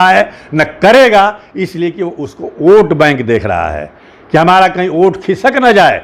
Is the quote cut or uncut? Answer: uncut